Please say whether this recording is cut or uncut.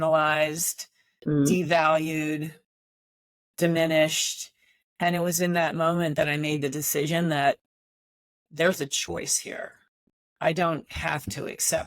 cut